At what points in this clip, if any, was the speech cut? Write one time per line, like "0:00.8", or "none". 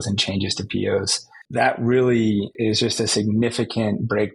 0:01.4
0:02.5